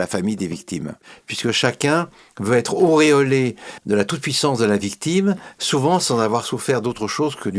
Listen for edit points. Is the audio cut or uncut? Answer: cut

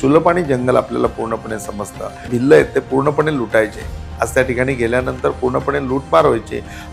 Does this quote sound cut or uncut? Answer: cut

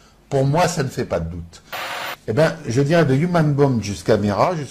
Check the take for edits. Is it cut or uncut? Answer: cut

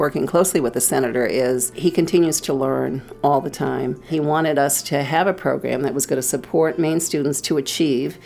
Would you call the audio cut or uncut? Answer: cut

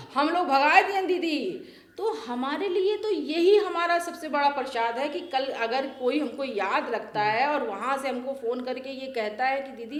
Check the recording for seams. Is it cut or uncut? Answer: uncut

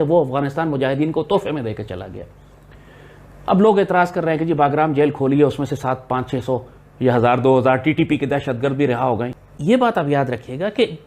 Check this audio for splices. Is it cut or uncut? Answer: cut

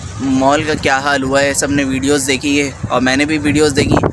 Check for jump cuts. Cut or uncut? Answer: uncut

